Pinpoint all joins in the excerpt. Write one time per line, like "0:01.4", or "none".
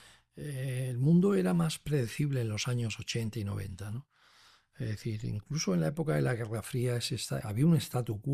none